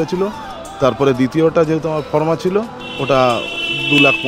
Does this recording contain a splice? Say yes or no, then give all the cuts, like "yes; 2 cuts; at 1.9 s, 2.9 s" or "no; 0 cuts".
no; 0 cuts